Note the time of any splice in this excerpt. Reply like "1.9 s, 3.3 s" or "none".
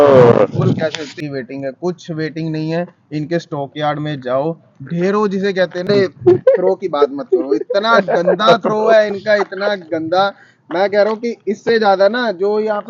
1.0 s, 5.9 s